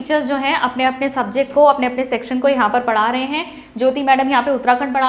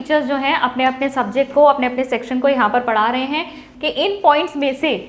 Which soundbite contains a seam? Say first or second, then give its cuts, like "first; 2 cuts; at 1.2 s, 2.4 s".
second; 1 cut; at 3.6 s